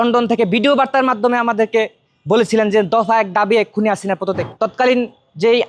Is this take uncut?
no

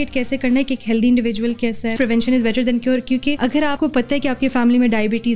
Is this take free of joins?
no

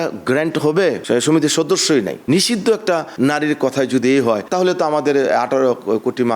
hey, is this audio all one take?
no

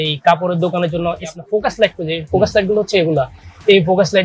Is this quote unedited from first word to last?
no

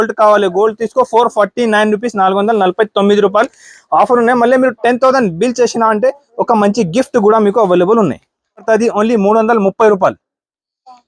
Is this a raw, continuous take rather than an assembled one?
no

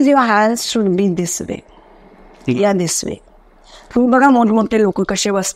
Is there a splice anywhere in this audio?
no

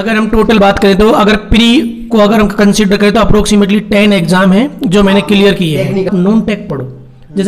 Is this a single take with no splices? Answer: no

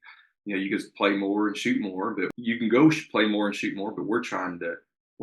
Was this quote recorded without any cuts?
no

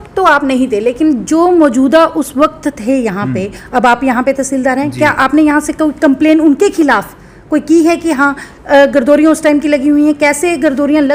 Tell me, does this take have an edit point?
no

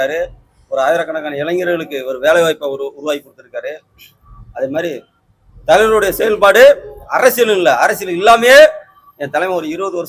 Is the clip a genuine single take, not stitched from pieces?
yes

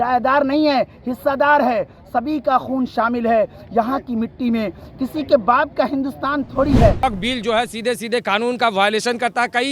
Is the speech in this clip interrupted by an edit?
yes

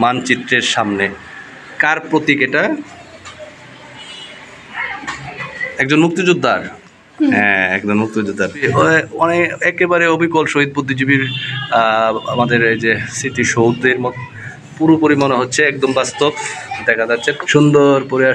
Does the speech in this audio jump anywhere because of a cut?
yes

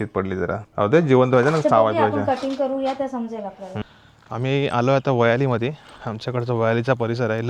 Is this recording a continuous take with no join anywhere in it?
no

